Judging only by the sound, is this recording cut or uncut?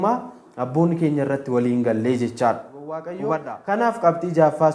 cut